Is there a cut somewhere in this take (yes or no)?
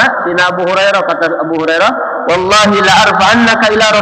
no